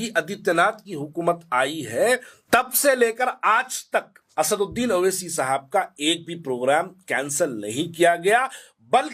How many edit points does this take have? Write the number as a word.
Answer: two